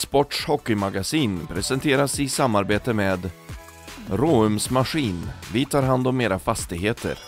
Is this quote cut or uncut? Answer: uncut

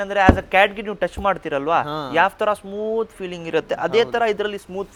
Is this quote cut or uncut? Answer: uncut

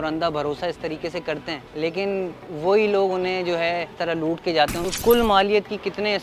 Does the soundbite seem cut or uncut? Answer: cut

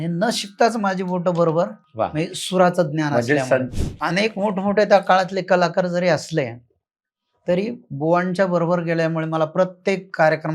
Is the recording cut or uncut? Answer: cut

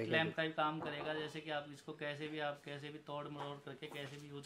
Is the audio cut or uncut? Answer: uncut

